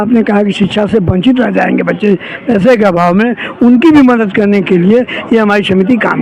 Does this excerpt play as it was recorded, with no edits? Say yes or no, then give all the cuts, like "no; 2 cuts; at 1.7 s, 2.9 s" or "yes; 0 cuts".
yes; 0 cuts